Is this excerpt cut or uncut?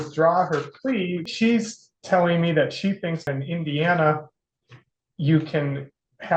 cut